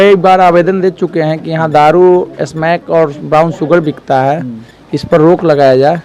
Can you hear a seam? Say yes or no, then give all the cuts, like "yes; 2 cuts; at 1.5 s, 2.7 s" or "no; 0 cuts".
no; 0 cuts